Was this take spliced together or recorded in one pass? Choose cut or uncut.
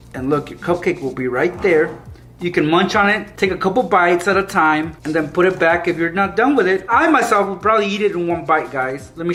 uncut